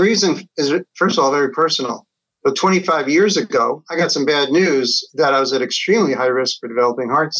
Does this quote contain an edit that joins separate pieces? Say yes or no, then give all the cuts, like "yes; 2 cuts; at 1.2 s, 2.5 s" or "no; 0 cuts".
yes; 1 cut; at 3.8 s